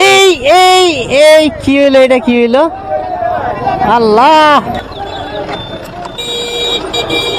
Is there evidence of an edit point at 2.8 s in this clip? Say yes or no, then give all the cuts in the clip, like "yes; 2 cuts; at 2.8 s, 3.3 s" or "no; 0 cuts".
no; 1 cut; at 4.8 s